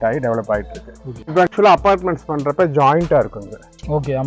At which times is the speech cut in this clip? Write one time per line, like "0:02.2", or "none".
0:01.5